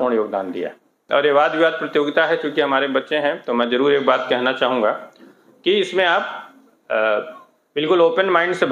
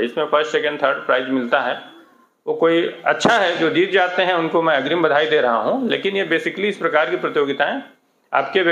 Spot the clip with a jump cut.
first; 1 cut; at 0.9 s

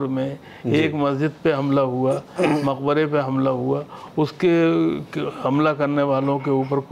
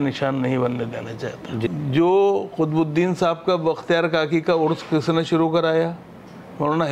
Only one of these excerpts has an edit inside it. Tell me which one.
second; 1 cut; at 1.7 s

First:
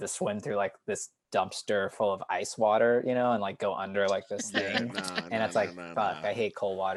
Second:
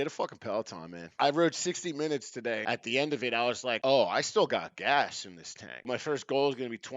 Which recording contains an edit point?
second; 4 cuts; at 1.2 s, 2.6 s, 3.8 s, 5.9 s

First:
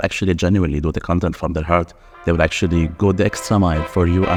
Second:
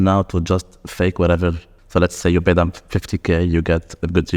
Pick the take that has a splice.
second; 1 cut; at 1.7 s

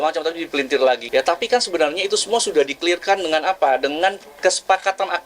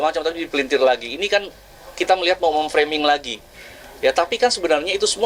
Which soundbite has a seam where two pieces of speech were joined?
first; 1 cut; at 1.0 s

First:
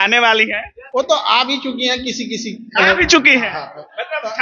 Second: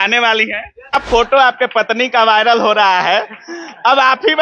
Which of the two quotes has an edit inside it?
second; 1 cut; at 0.9 s

